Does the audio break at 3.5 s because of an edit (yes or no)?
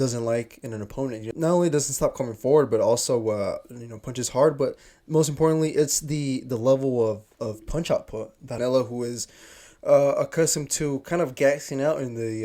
no